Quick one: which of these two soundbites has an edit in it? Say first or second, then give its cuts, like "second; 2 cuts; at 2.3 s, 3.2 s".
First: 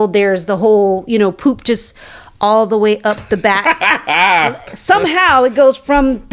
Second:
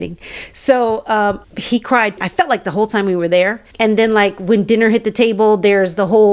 second; 1 cut; at 1.4 s